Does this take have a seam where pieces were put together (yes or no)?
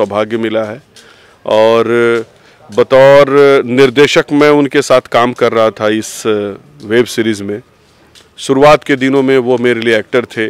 no